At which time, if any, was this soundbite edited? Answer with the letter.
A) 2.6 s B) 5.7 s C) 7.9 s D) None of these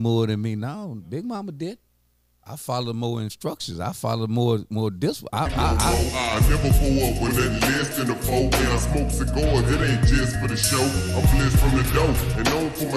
B